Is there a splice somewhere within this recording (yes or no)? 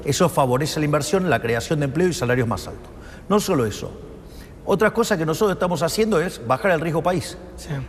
no